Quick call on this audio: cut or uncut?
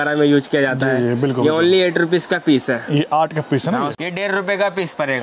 cut